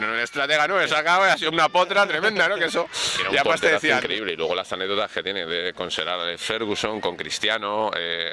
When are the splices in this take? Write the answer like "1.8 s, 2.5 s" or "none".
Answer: 4.0 s

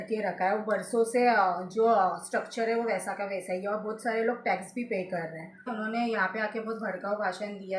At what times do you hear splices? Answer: 5.7 s

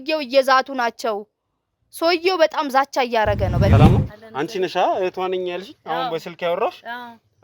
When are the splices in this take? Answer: 3.7 s

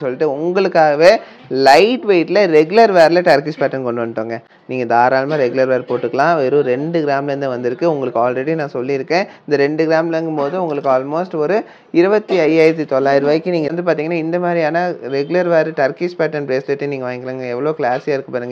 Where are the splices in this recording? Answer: none

